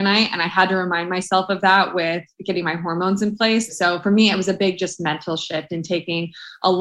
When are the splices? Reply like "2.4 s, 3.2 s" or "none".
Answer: 3.7 s